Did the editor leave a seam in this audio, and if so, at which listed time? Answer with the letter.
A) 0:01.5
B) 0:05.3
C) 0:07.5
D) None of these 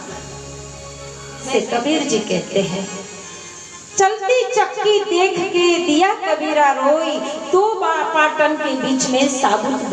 A